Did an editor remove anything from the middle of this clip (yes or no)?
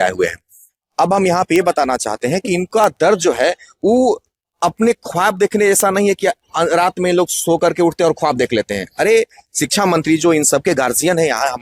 no